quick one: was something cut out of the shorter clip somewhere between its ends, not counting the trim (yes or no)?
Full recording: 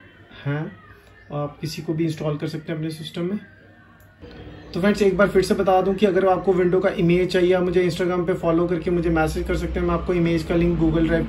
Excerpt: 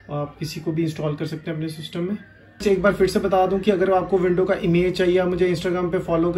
yes